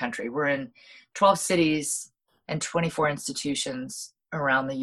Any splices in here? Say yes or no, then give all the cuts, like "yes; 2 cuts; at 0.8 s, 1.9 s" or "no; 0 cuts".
no; 0 cuts